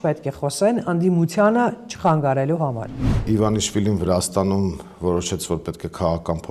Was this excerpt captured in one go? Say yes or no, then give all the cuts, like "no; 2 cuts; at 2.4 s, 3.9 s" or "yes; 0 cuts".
no; 1 cut; at 3.2 s